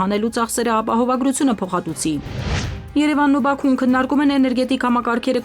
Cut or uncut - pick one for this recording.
cut